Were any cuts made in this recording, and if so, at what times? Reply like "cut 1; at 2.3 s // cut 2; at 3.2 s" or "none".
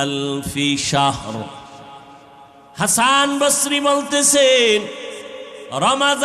cut 1; at 2.5 s